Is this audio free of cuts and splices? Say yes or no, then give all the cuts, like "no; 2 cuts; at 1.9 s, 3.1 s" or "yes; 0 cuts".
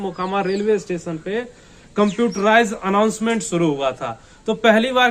yes; 0 cuts